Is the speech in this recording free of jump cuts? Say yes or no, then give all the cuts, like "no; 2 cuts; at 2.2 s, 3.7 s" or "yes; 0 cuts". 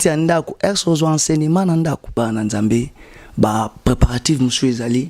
no; 1 cut; at 2.2 s